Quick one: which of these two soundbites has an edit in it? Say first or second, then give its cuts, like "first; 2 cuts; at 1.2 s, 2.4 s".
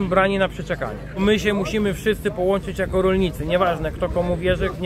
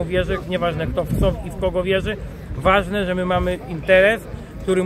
first; 1 cut; at 1.0 s